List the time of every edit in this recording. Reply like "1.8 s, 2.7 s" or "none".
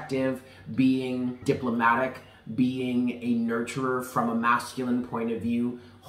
1.4 s